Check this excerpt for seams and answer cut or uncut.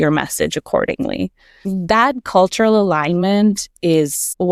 uncut